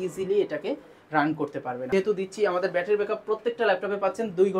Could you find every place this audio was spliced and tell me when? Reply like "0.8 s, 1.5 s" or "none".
1.8 s